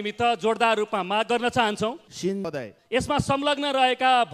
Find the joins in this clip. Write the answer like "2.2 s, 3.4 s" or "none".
2.4 s